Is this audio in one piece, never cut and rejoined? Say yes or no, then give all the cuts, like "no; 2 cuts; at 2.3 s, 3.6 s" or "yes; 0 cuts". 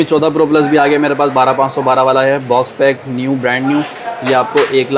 yes; 0 cuts